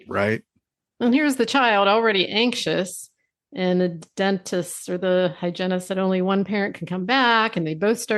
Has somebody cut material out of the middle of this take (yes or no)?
no